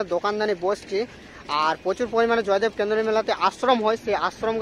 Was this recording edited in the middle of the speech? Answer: no; 0 cuts

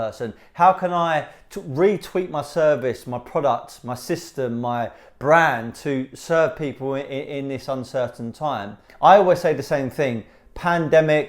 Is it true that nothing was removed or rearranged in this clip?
no; 1 cut; at 8.8 s

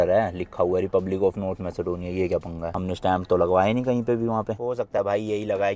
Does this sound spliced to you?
no; 0 cuts

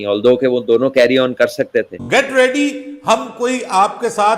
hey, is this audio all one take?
no; 1 cut; at 2.0 s

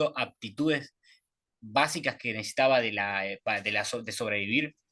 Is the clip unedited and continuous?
yes; 0 cuts

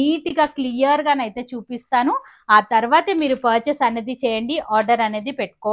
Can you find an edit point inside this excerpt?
no; 0 cuts

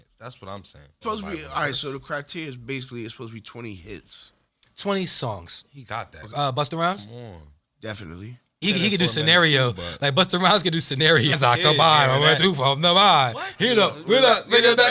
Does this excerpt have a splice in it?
yes; 4 cuts; at 1.0 s, 6.2 s, 8.6 s, 11.3 s

